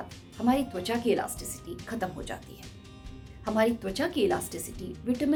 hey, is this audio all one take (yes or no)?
yes